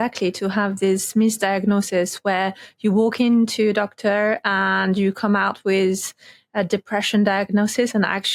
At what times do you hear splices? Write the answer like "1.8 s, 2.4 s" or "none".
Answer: none